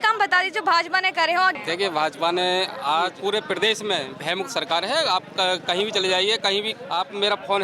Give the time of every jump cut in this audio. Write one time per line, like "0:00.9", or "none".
0:01.5
0:03.2
0:06.8